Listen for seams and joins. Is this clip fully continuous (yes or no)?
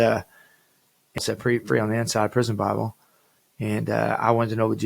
no